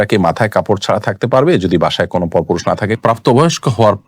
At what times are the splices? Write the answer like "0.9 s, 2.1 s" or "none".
3.0 s